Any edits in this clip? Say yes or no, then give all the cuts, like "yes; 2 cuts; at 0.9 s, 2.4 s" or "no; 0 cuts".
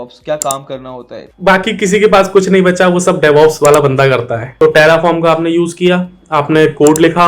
yes; 2 cuts; at 1.2 s, 4.4 s